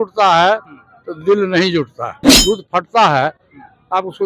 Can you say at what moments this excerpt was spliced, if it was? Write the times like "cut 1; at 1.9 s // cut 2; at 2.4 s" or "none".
cut 1; at 2.3 s

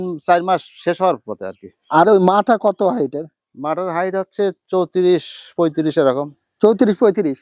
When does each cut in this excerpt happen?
none

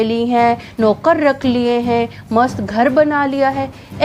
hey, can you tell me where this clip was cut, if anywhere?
none

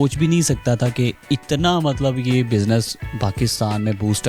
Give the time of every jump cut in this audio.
none

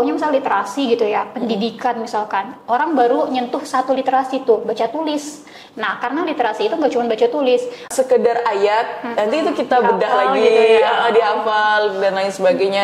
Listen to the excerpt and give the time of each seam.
cut 1; at 7.8 s

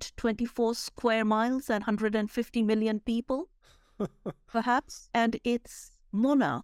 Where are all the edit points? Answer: none

